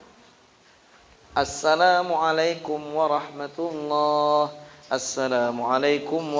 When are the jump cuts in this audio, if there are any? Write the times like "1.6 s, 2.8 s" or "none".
none